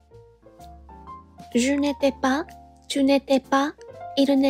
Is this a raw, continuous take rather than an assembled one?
no; 1 cut; at 1.0 s

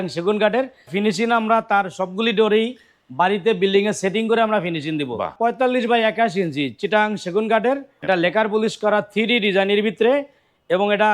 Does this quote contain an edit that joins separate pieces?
yes; 3 cuts; at 0.9 s, 5.3 s, 7.9 s

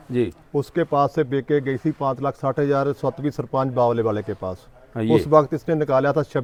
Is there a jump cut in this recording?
no; 0 cuts

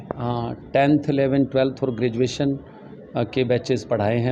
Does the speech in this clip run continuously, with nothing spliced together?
yes; 0 cuts

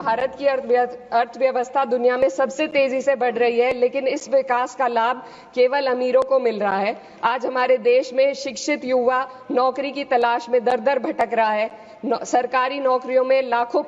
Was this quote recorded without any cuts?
yes; 0 cuts

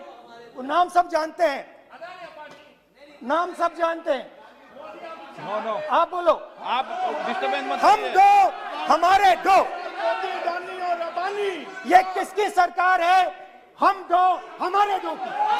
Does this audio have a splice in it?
no; 0 cuts

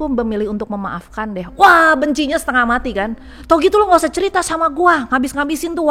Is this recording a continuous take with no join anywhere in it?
yes; 0 cuts

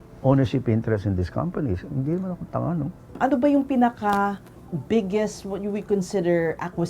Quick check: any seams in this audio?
yes; 1 cut; at 3.0 s

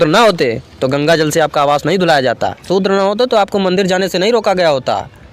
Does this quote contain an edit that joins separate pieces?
yes; 1 cut; at 2.7 s

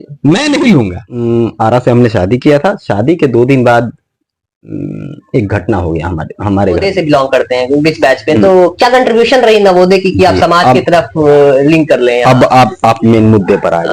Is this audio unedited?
no; 2 cuts; at 1.1 s, 6.8 s

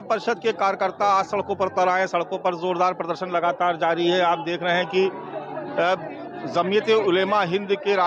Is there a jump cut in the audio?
no; 0 cuts

